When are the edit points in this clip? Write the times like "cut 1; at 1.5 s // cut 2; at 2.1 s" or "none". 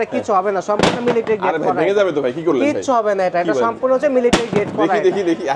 none